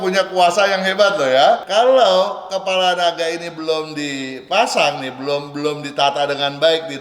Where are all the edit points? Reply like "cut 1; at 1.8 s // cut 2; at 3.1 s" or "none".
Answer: cut 1; at 1.6 s